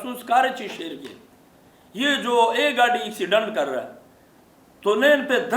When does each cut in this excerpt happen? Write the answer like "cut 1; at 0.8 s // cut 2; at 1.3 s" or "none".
none